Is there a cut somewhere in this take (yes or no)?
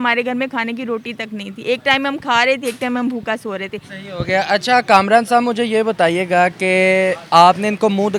no